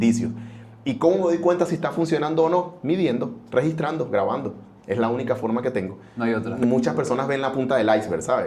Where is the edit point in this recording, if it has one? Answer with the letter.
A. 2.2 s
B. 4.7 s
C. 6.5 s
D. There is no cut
C